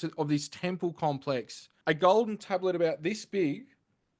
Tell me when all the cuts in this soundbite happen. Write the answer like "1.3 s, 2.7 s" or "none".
1.7 s